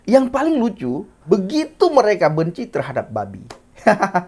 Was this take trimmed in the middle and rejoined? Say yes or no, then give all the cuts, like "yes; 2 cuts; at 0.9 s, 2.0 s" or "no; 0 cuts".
yes; 1 cut; at 1.1 s